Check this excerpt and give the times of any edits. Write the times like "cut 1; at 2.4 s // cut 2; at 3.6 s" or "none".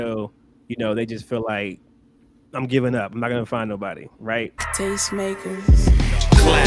cut 1; at 4.6 s